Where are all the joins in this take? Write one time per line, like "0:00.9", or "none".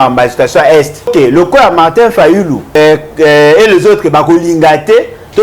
0:01.1
0:02.8